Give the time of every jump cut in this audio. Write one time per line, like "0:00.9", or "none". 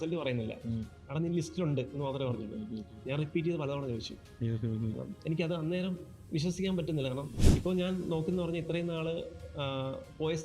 0:07.3